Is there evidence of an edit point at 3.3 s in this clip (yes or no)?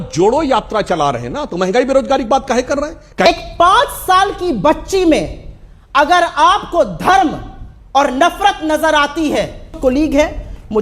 yes